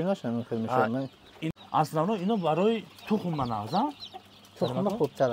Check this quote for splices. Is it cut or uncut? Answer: cut